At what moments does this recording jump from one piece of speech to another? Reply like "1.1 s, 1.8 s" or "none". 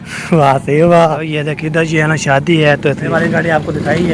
1.3 s, 3.1 s